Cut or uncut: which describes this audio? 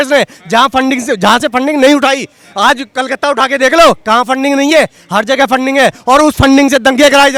uncut